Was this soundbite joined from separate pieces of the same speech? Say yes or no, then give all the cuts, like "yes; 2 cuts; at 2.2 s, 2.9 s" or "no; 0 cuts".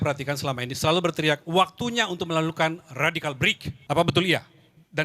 yes; 1 cut; at 3.7 s